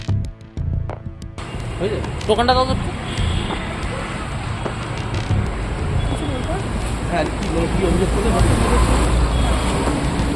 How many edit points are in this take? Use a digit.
1